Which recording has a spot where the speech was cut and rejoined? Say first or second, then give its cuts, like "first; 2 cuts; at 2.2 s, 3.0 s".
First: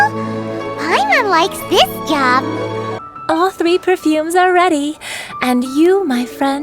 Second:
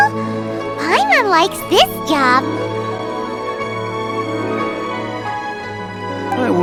first; 1 cut; at 3.0 s